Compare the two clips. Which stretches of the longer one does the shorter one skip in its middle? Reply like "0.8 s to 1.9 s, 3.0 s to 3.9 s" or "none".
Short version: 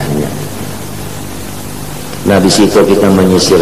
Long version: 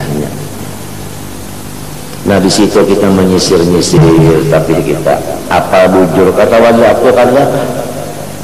none